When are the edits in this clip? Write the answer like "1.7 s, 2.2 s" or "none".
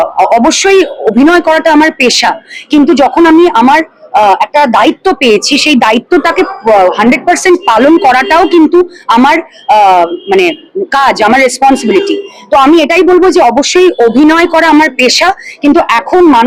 none